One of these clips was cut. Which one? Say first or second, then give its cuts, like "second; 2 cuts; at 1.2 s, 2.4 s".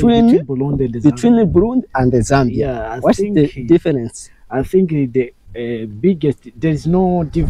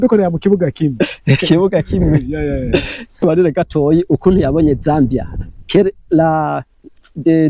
second; 1 cut; at 3.2 s